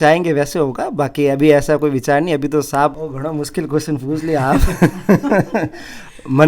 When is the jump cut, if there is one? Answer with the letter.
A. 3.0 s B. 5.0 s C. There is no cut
A